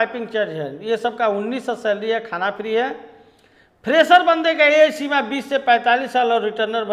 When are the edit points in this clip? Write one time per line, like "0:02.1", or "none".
none